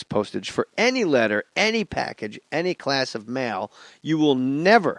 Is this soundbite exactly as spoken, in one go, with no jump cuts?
yes; 0 cuts

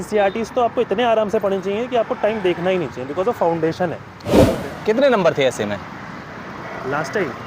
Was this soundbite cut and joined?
yes; 1 cut; at 4.6 s

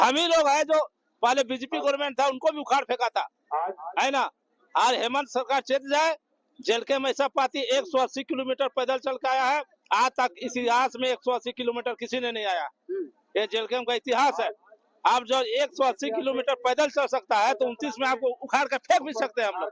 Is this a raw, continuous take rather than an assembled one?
yes; 0 cuts

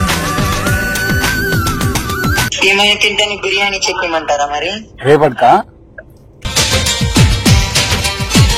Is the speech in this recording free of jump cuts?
no; 1 cut; at 2.5 s

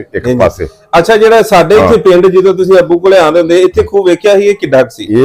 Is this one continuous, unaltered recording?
yes; 0 cuts

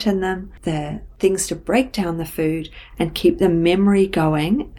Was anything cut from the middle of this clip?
no; 0 cuts

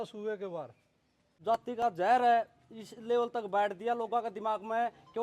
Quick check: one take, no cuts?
no; 1 cut; at 1.2 s

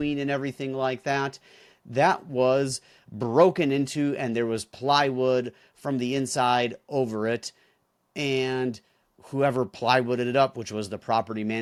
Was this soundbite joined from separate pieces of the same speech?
no; 0 cuts

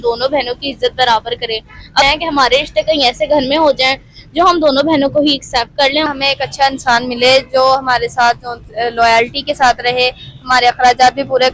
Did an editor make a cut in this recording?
yes; 2 cuts; at 2.0 s, 6.1 s

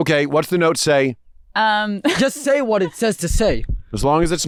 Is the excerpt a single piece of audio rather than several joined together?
yes; 0 cuts

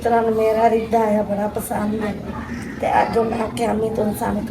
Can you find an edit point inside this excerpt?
no; 0 cuts

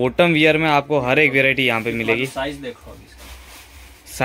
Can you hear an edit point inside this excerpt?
no; 0 cuts

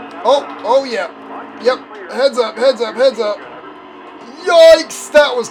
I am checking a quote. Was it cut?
no; 0 cuts

